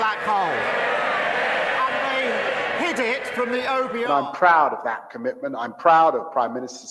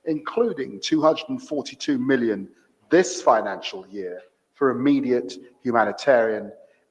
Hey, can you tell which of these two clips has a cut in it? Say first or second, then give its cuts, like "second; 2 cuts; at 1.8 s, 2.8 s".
first; 1 cut; at 4.1 s